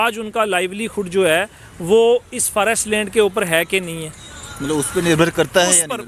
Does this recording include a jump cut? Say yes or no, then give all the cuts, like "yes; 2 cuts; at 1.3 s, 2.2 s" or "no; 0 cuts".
no; 0 cuts